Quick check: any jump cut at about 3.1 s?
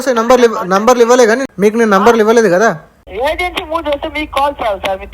yes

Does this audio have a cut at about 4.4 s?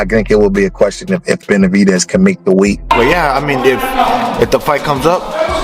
no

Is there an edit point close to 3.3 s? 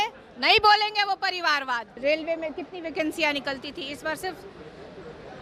no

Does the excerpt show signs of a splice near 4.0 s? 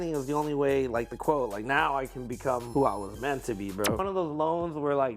yes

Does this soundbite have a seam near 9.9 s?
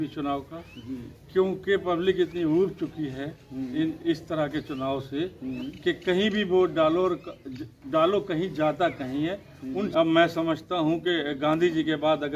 yes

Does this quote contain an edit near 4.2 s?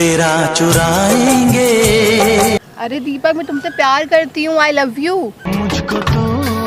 no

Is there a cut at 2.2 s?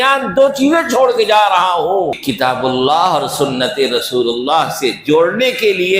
yes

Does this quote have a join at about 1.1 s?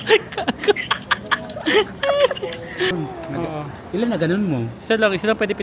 no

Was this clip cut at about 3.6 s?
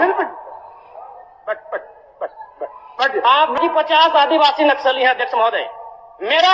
yes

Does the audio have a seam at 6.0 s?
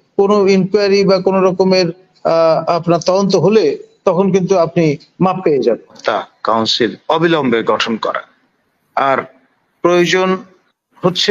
yes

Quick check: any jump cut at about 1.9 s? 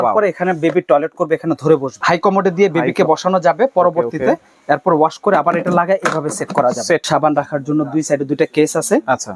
yes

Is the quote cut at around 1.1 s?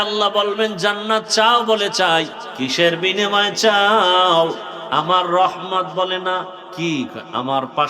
no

